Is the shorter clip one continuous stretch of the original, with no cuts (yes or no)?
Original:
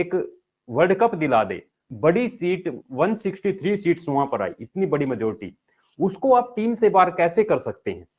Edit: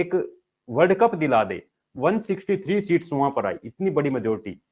no